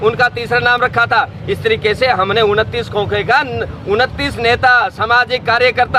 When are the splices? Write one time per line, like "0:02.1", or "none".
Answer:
none

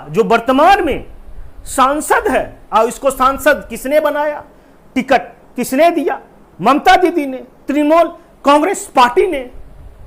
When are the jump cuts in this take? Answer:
none

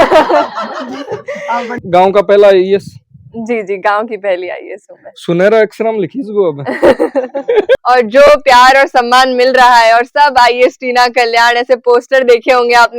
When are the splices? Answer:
0:01.8
0:07.8

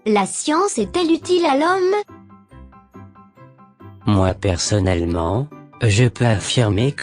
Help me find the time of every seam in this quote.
0:02.1
0:03.9

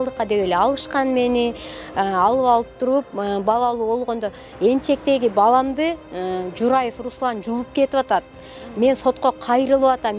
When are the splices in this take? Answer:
0:04.4

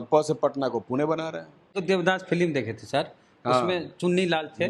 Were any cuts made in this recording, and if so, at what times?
0:01.7

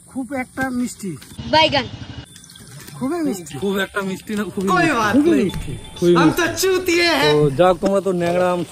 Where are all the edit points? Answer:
none

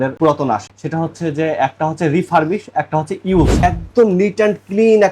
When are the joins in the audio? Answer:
0:03.6

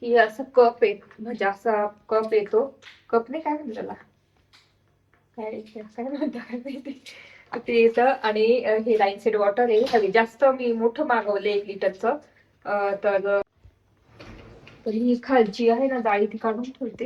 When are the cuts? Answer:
0:13.4

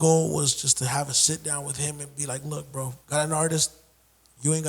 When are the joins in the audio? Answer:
0:03.0

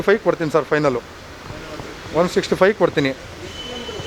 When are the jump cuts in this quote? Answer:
none

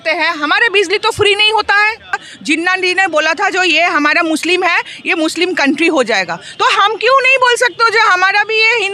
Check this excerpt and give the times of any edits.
0:02.3

